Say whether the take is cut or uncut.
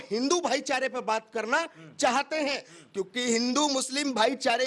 uncut